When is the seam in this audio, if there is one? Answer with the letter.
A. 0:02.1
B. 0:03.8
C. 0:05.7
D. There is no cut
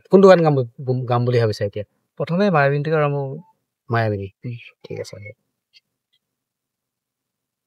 D